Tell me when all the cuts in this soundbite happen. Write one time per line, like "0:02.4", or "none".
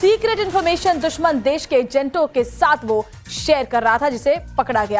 0:02.5